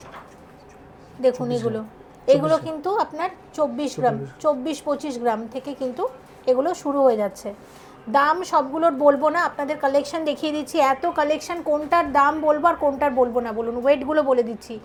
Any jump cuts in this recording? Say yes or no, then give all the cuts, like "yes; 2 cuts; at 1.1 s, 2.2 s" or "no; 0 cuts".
no; 0 cuts